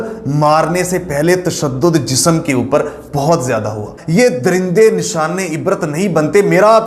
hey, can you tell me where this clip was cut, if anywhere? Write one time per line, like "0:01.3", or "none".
0:03.9